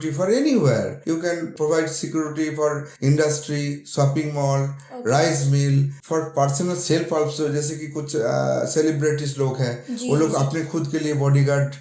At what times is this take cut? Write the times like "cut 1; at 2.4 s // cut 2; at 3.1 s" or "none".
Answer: cut 1; at 1.3 s // cut 2; at 2.9 s // cut 3; at 6.0 s